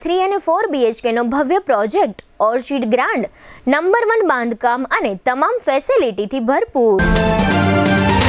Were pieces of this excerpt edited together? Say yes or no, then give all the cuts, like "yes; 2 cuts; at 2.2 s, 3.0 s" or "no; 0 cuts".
yes; 1 cut; at 7.0 s